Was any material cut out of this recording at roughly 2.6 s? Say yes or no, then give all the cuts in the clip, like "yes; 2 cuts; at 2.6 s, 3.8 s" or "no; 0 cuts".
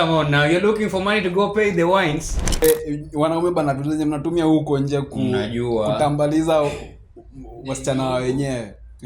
yes; 1 cut; at 2.6 s